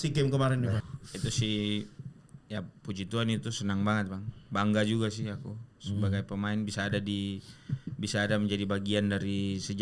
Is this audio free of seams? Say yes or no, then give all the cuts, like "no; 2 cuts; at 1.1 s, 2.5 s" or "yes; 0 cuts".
no; 1 cut; at 1.0 s